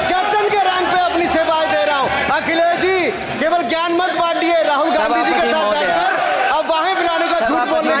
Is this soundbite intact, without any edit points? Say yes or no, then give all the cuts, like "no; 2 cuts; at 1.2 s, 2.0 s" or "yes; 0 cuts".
yes; 0 cuts